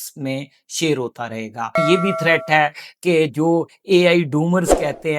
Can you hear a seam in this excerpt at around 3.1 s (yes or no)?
no